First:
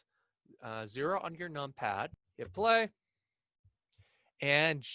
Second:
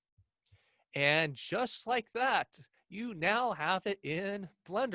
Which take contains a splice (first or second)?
first